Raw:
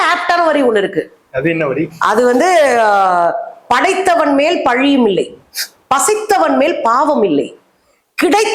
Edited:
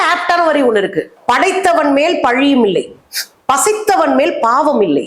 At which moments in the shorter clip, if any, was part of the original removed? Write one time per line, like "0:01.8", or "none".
0:01.1